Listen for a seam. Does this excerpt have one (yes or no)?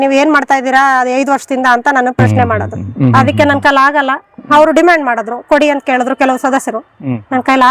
yes